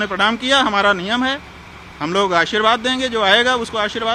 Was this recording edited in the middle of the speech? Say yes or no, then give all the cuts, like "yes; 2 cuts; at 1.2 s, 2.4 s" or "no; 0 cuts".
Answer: no; 0 cuts